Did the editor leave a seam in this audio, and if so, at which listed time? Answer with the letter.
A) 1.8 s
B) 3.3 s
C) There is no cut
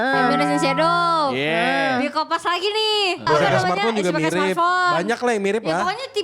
B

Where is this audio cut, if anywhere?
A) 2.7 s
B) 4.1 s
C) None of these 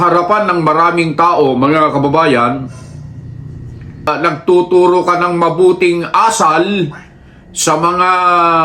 B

